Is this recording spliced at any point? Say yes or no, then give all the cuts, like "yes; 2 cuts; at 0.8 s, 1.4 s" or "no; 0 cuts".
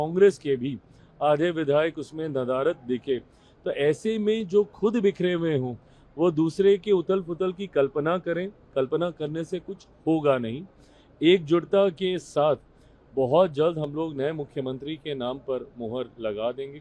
no; 0 cuts